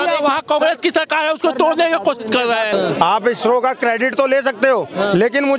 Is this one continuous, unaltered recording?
no; 1 cut; at 2.7 s

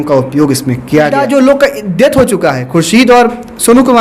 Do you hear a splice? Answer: yes; 1 cut; at 1.1 s

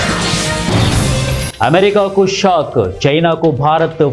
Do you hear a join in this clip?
yes; 1 cut; at 1.5 s

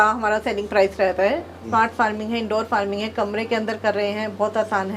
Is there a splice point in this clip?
yes; 1 cut; at 1.7 s

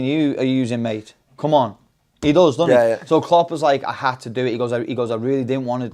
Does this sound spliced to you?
no; 0 cuts

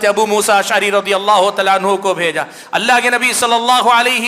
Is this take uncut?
yes; 0 cuts

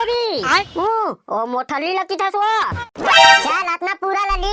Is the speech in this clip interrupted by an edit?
yes; 1 cut; at 2.8 s

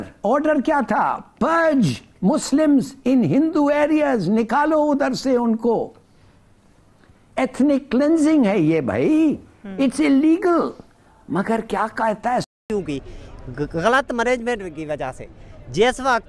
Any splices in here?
yes; 1 cut; at 12.6 s

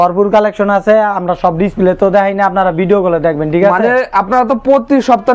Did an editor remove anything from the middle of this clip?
no; 0 cuts

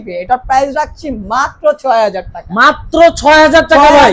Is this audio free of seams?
yes; 0 cuts

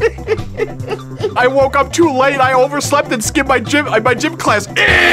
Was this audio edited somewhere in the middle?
yes; 1 cut; at 1.4 s

